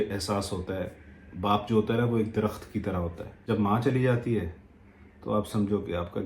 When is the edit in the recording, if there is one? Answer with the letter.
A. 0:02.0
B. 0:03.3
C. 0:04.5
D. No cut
B